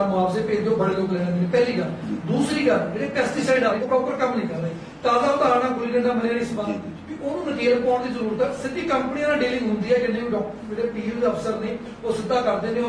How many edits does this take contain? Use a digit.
1